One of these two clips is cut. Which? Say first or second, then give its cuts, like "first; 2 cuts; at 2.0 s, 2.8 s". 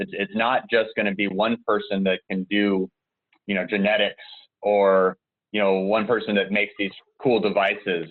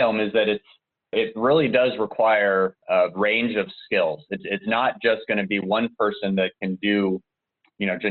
second; 2 cuts; at 1.1 s, 2.8 s